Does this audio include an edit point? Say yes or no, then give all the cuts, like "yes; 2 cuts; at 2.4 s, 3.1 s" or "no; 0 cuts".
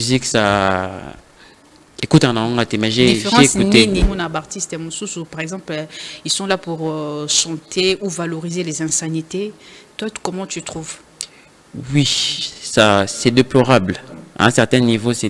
yes; 1 cut; at 4.0 s